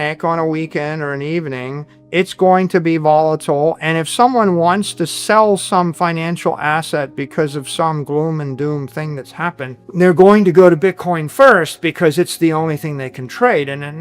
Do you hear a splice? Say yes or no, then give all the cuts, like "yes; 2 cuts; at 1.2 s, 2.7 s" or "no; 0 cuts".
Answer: yes; 1 cut; at 9.7 s